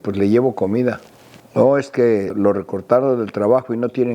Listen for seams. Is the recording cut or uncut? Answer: cut